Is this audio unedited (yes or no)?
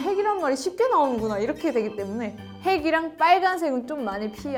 yes